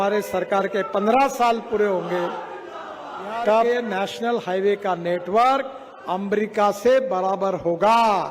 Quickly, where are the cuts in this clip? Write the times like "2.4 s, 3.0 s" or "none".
3.6 s